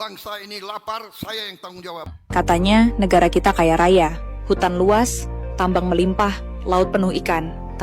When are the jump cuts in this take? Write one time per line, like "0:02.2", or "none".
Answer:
0:02.2

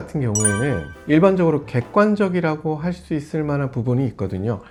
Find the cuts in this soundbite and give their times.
none

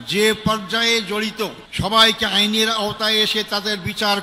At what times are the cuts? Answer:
0:01.6

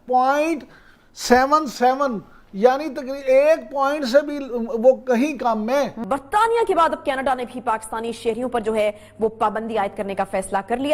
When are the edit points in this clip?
0:06.0

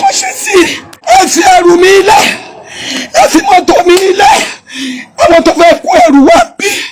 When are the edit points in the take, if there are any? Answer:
0:00.9

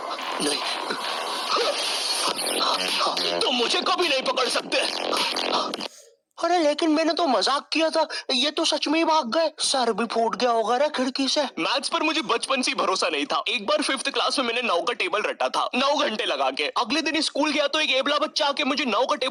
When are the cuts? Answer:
none

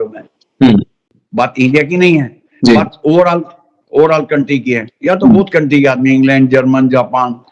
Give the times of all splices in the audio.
0:01.2

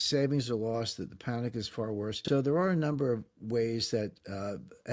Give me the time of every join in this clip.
0:02.2

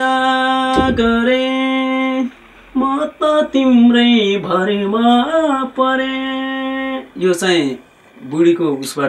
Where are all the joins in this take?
none

